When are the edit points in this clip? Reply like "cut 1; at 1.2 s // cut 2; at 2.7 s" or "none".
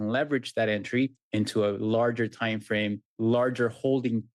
cut 1; at 1.2 s // cut 2; at 3.1 s